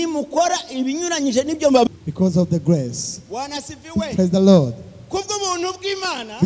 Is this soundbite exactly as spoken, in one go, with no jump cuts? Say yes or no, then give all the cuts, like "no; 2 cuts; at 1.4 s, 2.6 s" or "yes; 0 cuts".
no; 1 cut; at 1.9 s